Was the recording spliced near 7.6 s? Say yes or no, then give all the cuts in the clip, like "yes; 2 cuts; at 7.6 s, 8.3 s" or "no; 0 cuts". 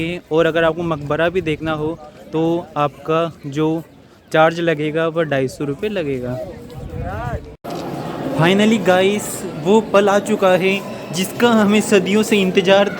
yes; 1 cut; at 7.6 s